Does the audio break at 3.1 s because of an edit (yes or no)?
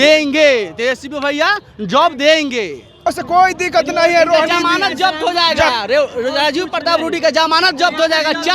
yes